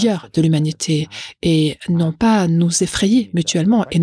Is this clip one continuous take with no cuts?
yes; 0 cuts

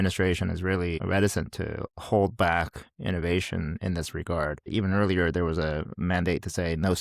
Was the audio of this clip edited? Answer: yes; 2 cuts; at 1.0 s, 4.7 s

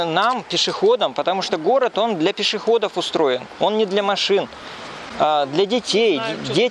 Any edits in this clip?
no; 0 cuts

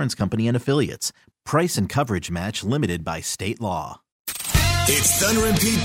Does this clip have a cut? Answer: yes; 1 cut; at 4.2 s

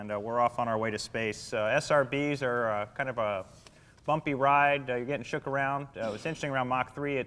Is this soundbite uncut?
no; 1 cut; at 5.3 s

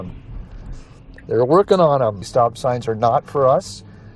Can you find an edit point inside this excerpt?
yes; 1 cut; at 2.2 s

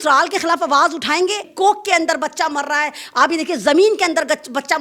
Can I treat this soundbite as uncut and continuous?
no; 1 cut; at 1.5 s

